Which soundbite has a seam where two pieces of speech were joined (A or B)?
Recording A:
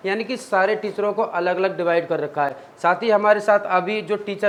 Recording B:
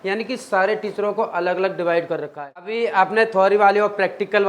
B